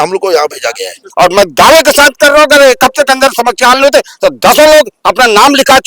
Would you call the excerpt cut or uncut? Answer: cut